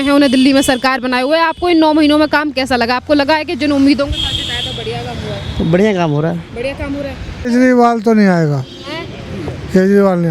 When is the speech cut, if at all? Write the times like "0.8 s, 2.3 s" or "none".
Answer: 7.4 s

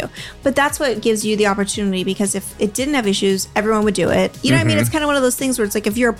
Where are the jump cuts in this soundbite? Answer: none

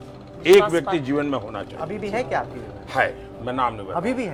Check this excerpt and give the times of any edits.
none

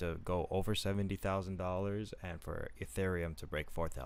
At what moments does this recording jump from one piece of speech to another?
none

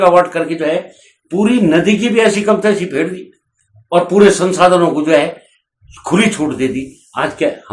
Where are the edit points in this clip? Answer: none

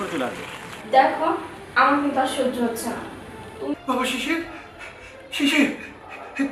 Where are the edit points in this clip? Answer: 3.7 s

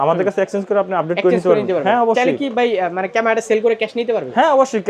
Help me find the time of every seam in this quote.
none

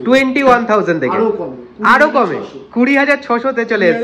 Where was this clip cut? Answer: none

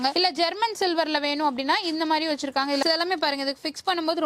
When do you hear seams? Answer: 2.8 s

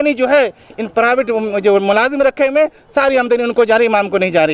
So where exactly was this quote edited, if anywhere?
none

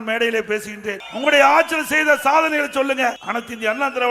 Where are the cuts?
1.1 s, 3.2 s

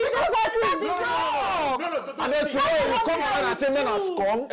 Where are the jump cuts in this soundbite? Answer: none

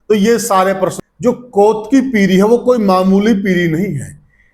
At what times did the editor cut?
1.0 s

